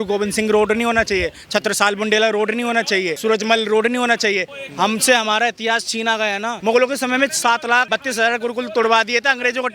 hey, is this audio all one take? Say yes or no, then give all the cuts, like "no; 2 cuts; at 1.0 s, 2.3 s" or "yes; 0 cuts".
no; 4 cuts; at 3.1 s, 4.5 s, 6.5 s, 7.9 s